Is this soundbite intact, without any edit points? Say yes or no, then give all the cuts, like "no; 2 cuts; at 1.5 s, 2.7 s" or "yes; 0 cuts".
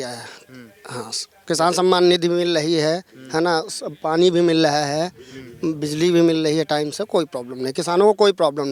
yes; 0 cuts